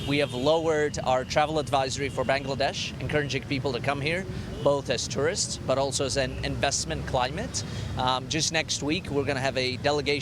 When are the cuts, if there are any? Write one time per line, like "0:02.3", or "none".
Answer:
none

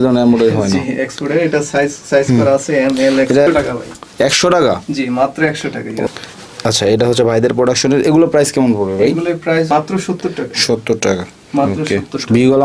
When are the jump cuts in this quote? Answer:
0:03.5
0:06.1
0:09.7

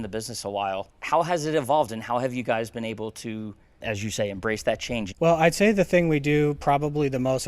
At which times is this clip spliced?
0:00.9
0:03.8
0:05.1

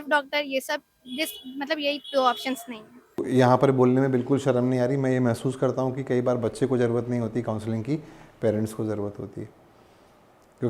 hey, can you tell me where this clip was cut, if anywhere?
0:03.2

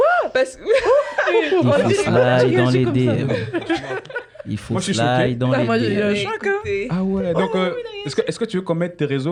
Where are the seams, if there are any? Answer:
none

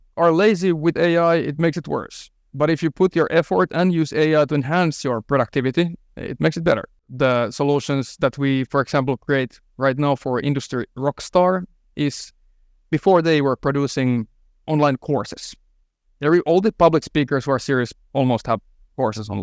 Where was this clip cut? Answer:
0:07.0

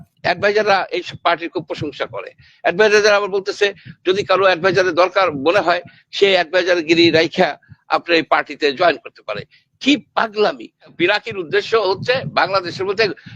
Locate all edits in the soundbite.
0:10.9

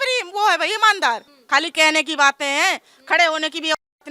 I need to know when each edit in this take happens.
0:01.3

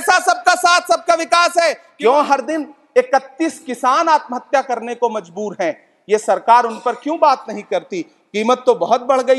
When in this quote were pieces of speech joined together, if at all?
0:01.9

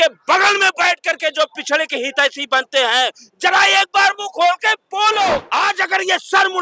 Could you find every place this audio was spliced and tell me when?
0:05.5

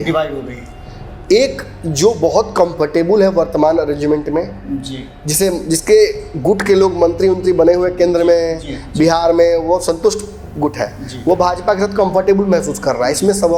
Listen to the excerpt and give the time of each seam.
none

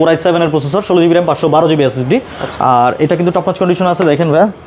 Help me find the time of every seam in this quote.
none

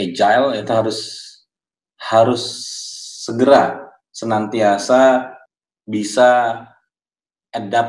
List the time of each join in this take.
0:05.4

